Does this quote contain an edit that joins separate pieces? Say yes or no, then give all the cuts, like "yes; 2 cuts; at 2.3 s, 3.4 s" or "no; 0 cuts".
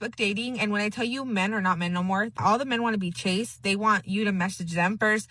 yes; 1 cut; at 2.3 s